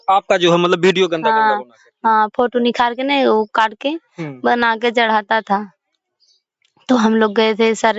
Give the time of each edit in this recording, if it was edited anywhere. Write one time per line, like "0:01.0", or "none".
none